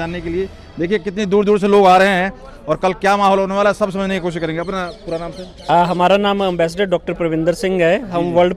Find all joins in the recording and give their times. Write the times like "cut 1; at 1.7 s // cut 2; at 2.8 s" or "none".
none